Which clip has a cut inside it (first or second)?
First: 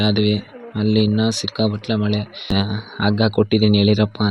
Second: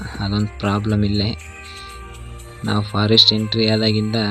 first